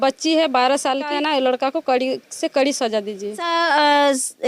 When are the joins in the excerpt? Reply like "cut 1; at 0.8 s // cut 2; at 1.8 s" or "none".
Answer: cut 1; at 1.1 s // cut 2; at 3.5 s